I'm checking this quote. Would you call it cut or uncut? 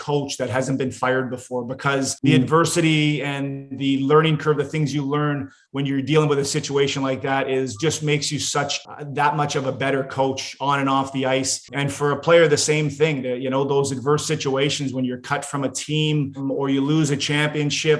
cut